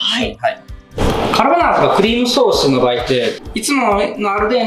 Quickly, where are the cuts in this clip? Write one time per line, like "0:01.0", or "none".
0:01.0
0:03.5